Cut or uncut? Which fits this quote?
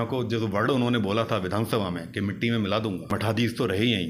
cut